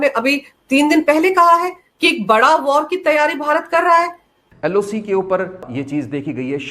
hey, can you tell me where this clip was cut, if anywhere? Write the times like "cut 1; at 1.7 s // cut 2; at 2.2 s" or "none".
cut 1; at 4.3 s // cut 2; at 5.7 s

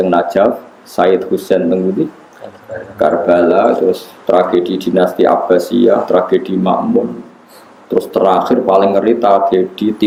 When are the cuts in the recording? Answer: none

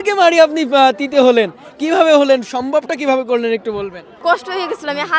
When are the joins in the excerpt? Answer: cut 1; at 4.1 s

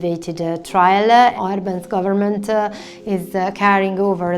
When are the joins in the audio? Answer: cut 1; at 1.4 s

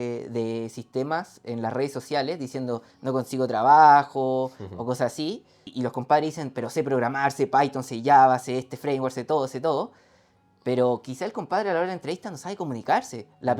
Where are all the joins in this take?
cut 1; at 5.7 s

